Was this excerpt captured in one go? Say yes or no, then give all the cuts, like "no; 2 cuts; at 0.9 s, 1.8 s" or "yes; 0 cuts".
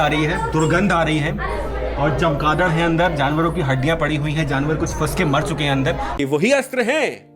no; 1 cut; at 6.1 s